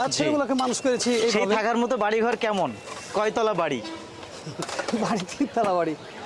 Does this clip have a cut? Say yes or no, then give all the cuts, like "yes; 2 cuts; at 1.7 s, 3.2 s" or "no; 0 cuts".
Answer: no; 0 cuts